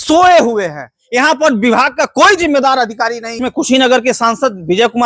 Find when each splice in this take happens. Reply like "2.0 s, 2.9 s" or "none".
3.3 s